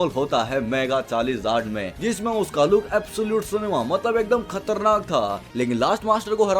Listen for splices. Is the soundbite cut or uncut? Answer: cut